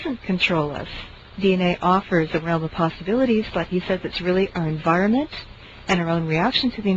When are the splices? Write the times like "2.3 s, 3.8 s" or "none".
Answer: none